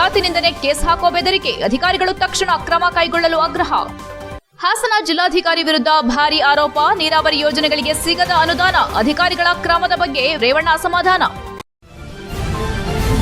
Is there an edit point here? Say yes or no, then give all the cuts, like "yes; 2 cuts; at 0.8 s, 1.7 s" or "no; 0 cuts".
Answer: yes; 1 cut; at 11.6 s